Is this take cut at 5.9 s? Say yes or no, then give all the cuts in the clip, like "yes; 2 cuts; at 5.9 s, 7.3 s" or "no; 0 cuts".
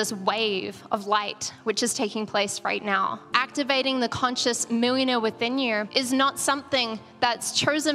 yes; 2 cuts; at 3.3 s, 5.9 s